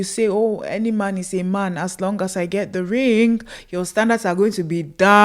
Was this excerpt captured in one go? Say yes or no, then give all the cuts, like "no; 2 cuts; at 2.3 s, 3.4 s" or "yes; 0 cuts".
yes; 0 cuts